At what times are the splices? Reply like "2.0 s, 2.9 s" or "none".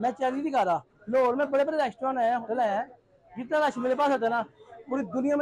0.9 s, 2.6 s